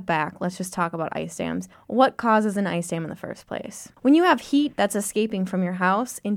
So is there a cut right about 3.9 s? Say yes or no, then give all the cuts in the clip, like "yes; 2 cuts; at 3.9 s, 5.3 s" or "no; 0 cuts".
yes; 1 cut; at 3.9 s